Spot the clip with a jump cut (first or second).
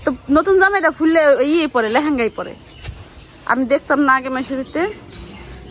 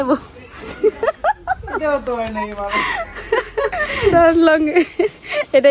second